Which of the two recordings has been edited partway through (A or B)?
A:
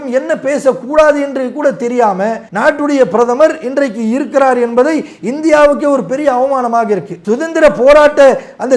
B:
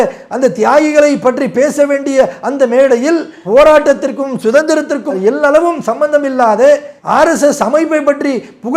A